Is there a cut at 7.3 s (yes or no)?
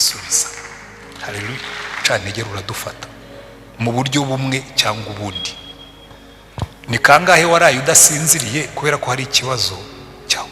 no